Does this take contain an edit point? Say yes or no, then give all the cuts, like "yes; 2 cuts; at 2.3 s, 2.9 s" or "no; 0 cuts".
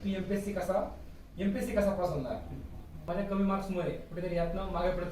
yes; 1 cut; at 3.0 s